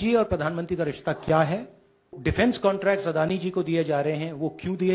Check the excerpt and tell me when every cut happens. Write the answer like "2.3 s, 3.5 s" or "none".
2.2 s

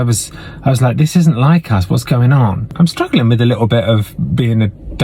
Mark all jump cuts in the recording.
2.7 s

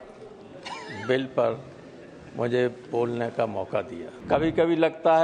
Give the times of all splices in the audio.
4.1 s

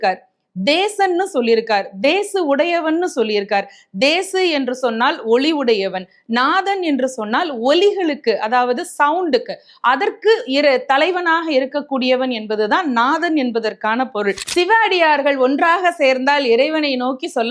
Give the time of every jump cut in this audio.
14.4 s

